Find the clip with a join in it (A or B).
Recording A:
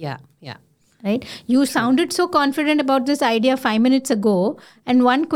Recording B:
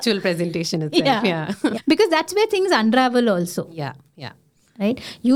B